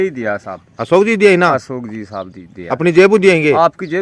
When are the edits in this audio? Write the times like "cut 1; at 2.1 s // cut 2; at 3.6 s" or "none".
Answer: none

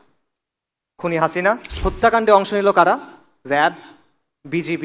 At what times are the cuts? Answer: cut 1; at 1.7 s

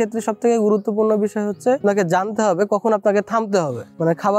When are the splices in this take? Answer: cut 1; at 1.8 s

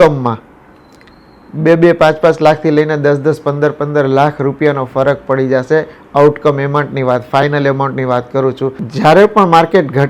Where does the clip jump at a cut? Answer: cut 1; at 8.9 s

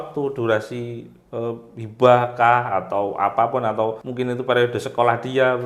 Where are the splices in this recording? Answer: cut 1; at 4.0 s

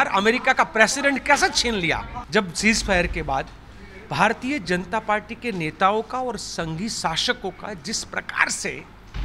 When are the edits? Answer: cut 1; at 2.1 s

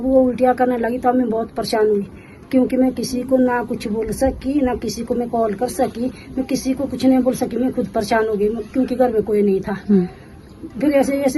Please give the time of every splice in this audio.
none

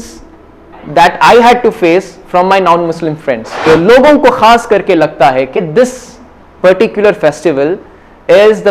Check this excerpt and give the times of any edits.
cut 1; at 3.6 s

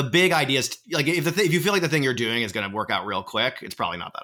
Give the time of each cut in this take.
none

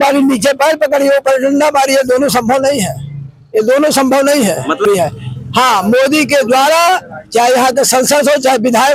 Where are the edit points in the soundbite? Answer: none

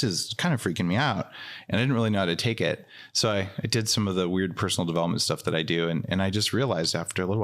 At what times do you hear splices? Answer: none

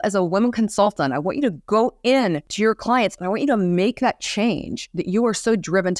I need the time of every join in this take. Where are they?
cut 1; at 2.5 s

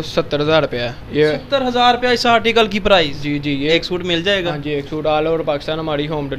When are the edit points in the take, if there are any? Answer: cut 1; at 3.7 s

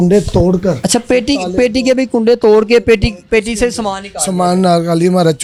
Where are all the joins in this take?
none

